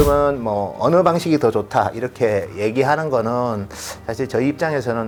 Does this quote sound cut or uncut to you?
uncut